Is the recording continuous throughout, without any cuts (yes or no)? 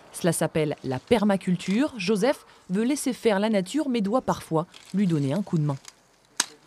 no